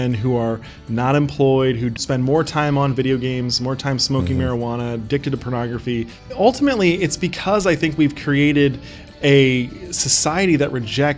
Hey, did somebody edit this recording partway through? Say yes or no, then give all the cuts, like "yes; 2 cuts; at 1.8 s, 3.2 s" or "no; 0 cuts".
yes; 2 cuts; at 2.0 s, 6.2 s